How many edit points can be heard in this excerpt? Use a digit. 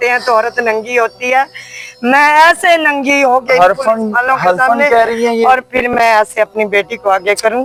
0